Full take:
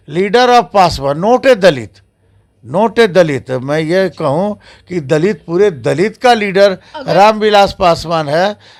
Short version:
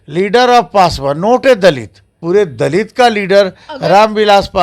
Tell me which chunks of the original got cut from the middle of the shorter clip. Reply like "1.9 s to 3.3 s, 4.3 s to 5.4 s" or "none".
2.2 s to 5.4 s